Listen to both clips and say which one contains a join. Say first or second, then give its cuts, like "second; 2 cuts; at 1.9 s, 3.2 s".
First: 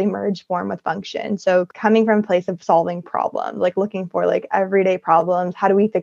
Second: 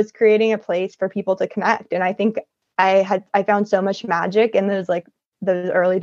first; 1 cut; at 1.7 s